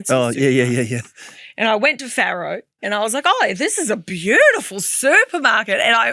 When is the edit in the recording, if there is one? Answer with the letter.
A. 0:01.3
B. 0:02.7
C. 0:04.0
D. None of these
D